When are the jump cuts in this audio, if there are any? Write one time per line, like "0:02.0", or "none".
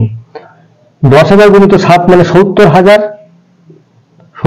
none